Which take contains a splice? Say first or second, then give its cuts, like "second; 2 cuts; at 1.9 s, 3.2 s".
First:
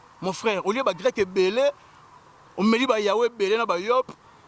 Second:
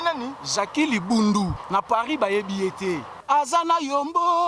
second; 2 cuts; at 1.6 s, 3.1 s